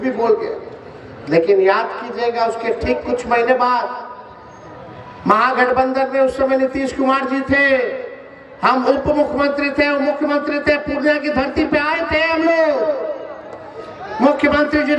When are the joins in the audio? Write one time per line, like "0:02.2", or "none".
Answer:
none